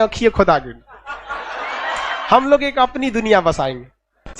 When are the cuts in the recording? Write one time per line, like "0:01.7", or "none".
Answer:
0:02.1